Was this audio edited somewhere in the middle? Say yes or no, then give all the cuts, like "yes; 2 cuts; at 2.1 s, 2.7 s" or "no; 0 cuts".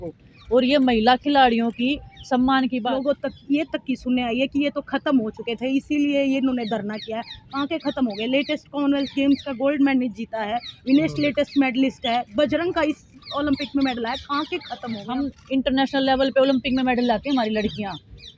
yes; 2 cuts; at 2.8 s, 15.1 s